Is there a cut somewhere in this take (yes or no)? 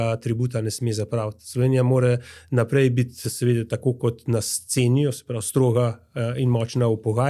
no